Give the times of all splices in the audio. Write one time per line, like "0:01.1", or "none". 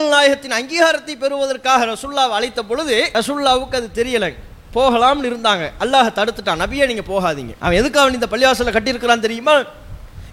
0:03.1
0:07.5